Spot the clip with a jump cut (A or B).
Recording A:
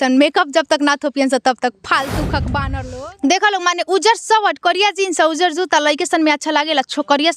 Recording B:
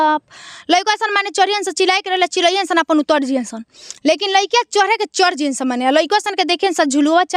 A